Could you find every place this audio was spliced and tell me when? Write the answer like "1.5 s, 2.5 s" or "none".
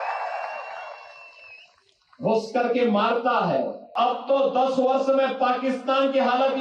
3.9 s